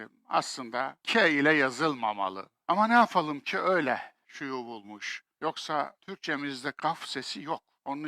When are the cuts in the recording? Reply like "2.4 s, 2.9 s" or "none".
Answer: 4.5 s